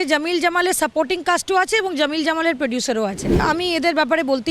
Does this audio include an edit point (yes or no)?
yes